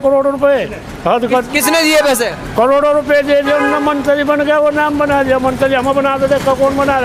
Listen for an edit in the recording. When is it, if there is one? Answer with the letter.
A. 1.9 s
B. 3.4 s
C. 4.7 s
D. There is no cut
D